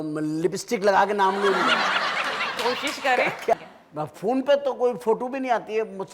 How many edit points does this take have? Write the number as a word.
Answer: one